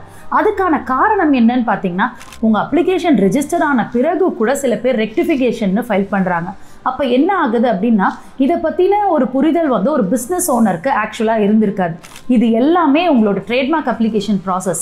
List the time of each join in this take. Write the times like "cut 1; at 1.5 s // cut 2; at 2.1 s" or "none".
cut 1; at 2.2 s // cut 2; at 12.1 s

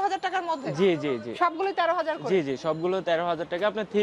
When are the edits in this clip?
none

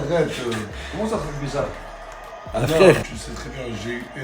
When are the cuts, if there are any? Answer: cut 1; at 3.0 s

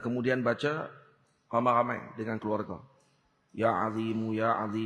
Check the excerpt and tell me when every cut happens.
none

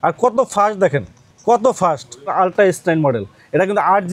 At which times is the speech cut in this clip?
cut 1; at 2.3 s

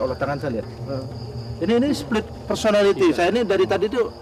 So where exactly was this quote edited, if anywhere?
none

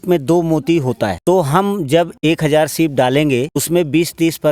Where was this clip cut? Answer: cut 1; at 1.2 s // cut 2; at 2.2 s // cut 3; at 3.6 s

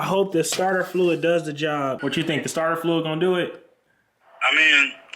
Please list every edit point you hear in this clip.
cut 1; at 2.0 s

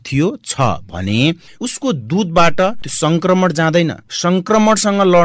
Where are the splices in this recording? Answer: cut 1; at 2.9 s

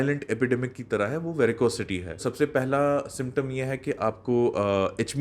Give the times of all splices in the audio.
cut 1; at 2.3 s

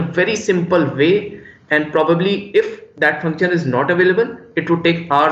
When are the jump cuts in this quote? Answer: none

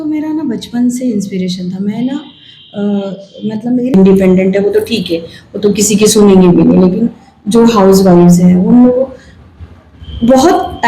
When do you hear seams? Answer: cut 1; at 3.9 s

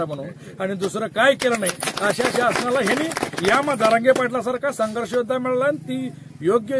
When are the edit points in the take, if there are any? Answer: none

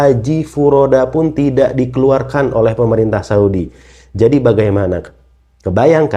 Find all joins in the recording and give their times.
none

